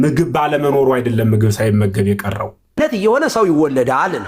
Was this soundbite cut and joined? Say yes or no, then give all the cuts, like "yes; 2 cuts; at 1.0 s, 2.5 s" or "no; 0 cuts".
yes; 1 cut; at 2.8 s